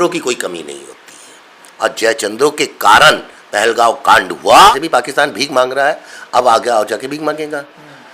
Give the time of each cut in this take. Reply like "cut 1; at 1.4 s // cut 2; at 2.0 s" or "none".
cut 1; at 4.8 s